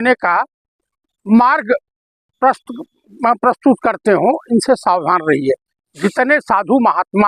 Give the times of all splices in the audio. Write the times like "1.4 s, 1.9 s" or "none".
none